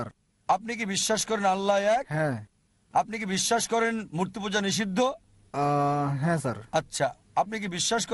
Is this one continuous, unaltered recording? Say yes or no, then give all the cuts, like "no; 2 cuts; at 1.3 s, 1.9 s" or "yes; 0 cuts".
yes; 0 cuts